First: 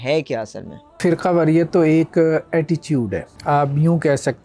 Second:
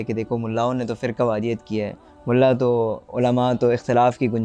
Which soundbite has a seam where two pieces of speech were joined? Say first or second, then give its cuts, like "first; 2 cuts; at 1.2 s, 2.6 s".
first; 2 cuts; at 1.0 s, 3.3 s